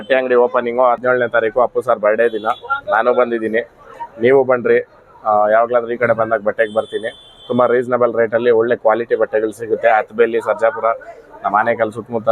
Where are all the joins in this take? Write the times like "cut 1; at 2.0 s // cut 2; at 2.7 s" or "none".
cut 1; at 1.0 s